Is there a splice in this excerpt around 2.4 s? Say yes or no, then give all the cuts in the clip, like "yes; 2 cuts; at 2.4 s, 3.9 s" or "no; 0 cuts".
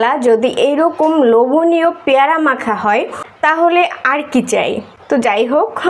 no; 1 cut; at 4.9 s